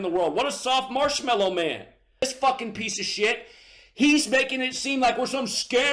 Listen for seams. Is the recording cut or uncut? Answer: cut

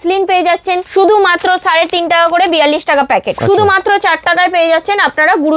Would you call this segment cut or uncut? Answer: cut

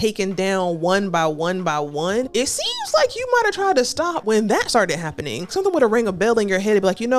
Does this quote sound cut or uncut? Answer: cut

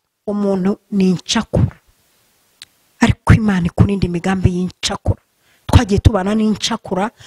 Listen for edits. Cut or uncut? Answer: uncut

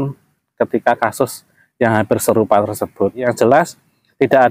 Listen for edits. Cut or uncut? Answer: cut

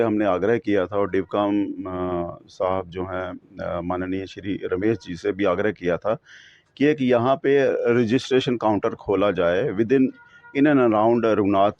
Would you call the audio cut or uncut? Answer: uncut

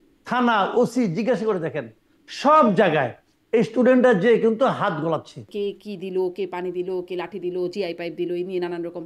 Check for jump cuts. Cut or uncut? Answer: cut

